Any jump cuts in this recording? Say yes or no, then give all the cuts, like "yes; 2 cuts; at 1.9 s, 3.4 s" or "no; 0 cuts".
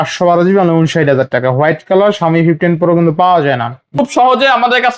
yes; 1 cut; at 4.0 s